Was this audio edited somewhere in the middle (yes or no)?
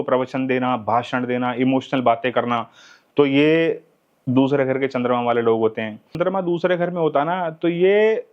yes